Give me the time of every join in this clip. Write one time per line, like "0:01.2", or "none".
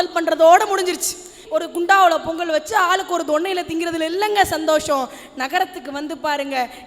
0:01.4